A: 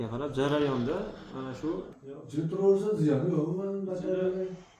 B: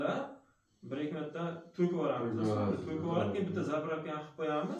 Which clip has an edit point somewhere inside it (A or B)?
A